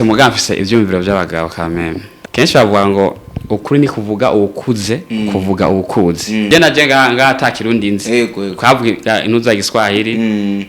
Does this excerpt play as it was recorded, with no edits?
no; 2 cuts; at 2.1 s, 6.5 s

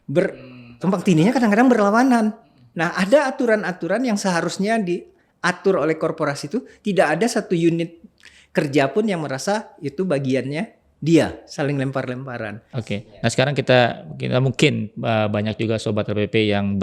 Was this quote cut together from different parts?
yes; 1 cut; at 12.7 s

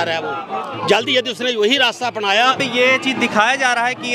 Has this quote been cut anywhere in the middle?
yes; 1 cut; at 2.6 s

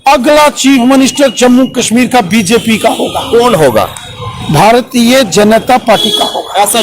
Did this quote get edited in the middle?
no; 0 cuts

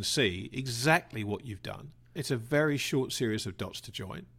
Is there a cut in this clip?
yes; 1 cut; at 2.2 s

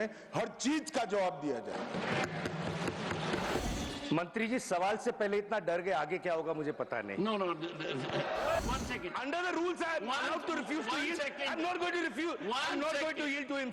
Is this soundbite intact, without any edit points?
no; 2 cuts; at 3.6 s, 8.6 s

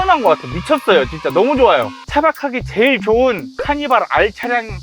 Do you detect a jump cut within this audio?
yes; 1 cut; at 1.9 s

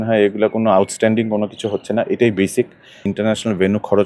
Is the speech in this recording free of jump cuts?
no; 1 cut; at 3.0 s

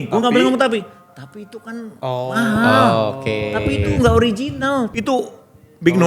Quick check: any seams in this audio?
yes; 1 cut; at 4.9 s

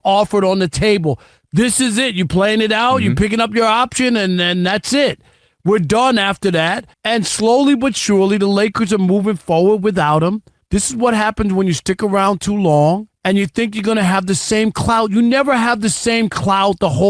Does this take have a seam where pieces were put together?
yes; 3 cuts; at 6.9 s, 10.5 s, 13.1 s

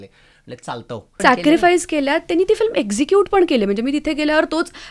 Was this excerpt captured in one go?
no; 1 cut; at 1.1 s

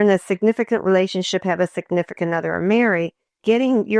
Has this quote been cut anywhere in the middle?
no; 0 cuts

